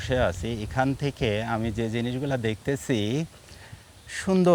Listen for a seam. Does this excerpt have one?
no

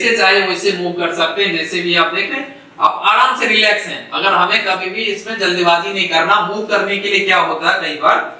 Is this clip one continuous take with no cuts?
yes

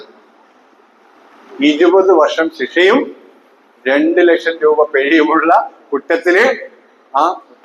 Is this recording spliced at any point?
no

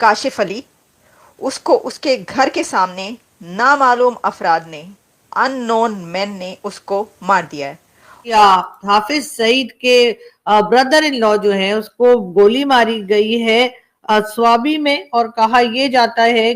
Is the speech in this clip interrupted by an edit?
yes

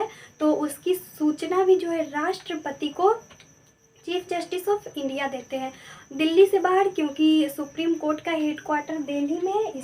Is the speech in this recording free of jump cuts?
yes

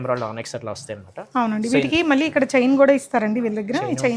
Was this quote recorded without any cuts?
yes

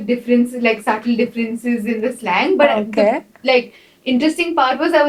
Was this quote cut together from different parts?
no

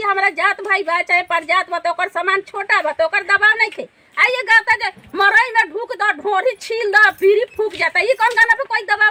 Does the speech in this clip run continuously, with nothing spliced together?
yes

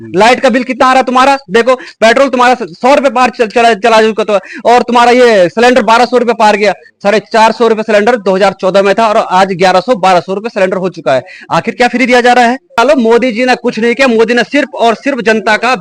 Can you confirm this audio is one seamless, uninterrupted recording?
no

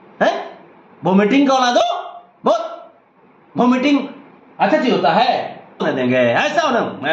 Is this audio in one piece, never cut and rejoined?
no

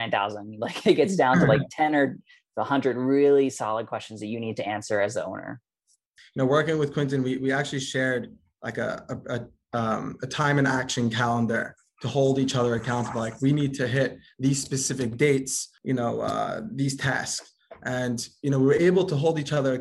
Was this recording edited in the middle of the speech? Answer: yes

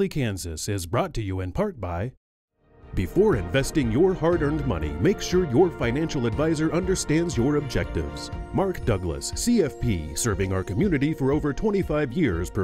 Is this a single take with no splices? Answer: no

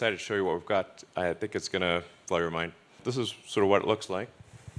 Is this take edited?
yes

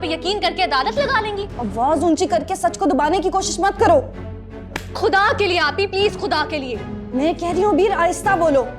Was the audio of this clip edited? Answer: yes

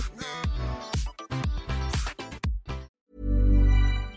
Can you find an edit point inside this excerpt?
yes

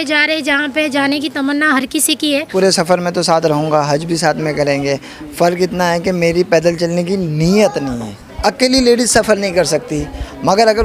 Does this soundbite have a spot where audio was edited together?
yes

